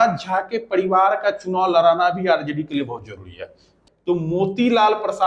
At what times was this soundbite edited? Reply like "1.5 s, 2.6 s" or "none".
3.7 s